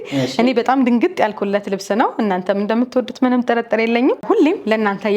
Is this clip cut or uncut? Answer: cut